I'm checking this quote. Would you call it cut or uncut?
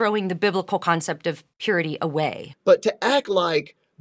cut